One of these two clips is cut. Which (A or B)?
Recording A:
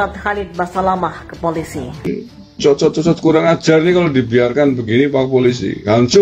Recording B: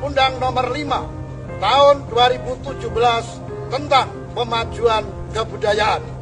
A